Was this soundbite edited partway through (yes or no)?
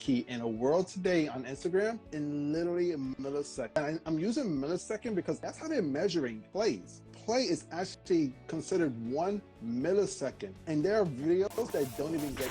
yes